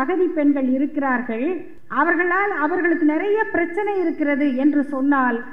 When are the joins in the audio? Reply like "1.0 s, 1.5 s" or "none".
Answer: 1.7 s